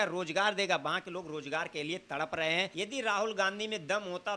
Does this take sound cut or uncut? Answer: cut